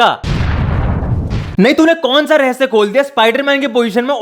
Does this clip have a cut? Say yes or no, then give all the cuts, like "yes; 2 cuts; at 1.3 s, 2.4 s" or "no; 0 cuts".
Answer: yes; 1 cut; at 1.4 s